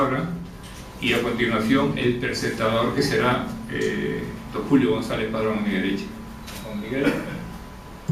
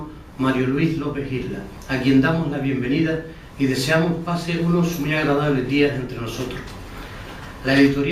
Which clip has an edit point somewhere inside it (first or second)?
second